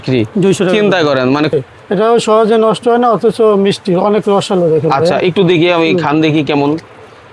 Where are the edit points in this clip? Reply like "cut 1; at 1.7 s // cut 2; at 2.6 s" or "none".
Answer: cut 1; at 1.5 s